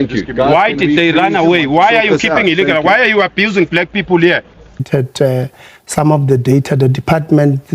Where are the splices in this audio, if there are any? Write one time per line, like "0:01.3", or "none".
0:04.9